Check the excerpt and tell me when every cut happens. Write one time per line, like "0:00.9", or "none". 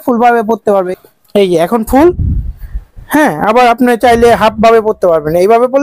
none